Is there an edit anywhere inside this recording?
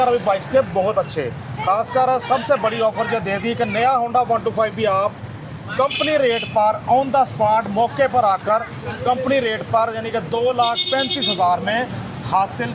no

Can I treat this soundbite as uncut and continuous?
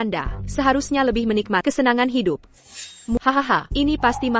no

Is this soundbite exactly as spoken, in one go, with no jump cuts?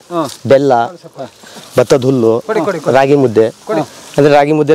yes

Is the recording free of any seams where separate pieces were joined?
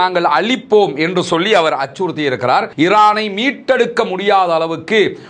no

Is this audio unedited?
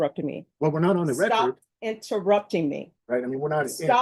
no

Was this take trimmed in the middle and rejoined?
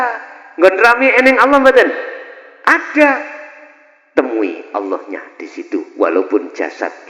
no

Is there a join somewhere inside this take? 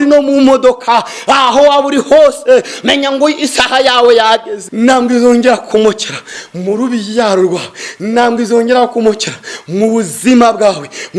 yes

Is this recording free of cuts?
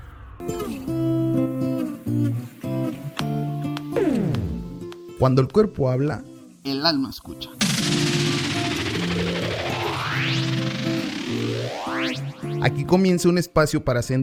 yes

